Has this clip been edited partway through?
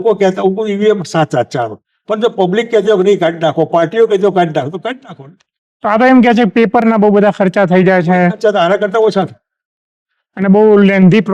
no; 0 cuts

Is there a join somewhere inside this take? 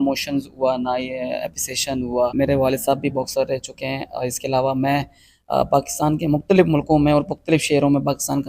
yes; 1 cut; at 2.3 s

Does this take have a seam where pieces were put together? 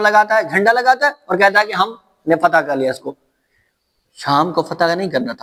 no; 0 cuts

